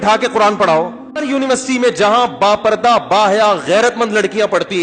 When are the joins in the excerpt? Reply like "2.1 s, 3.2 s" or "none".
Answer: 1.1 s

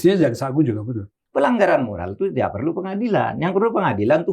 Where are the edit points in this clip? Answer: 1.2 s

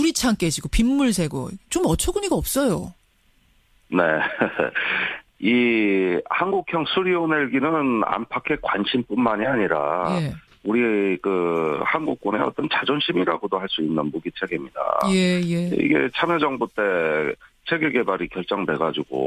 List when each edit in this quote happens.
none

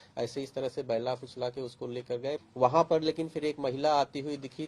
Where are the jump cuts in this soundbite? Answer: 2.4 s

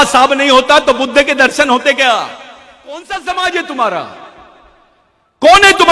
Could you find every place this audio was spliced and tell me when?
3.0 s

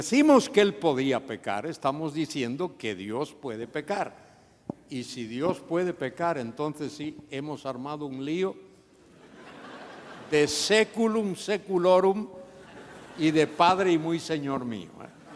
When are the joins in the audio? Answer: none

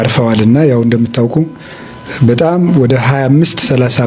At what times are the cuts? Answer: none

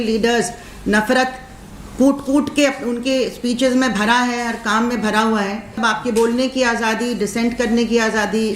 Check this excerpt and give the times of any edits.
5.7 s

